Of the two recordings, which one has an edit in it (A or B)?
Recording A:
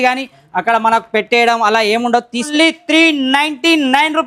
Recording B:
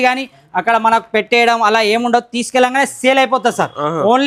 A